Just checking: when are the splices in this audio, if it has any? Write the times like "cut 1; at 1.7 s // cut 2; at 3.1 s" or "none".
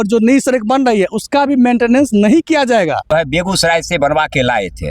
cut 1; at 3.1 s

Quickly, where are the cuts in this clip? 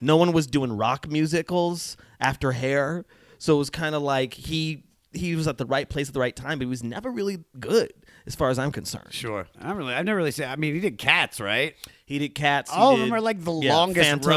cut 1; at 9.5 s

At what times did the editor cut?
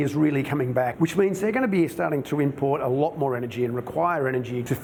none

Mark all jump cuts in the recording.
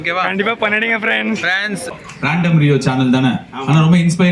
cut 1; at 2.2 s

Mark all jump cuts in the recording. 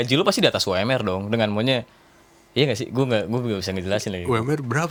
none

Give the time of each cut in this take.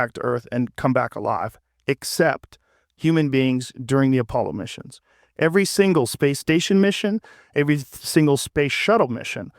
none

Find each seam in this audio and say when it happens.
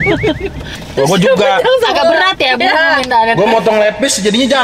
none

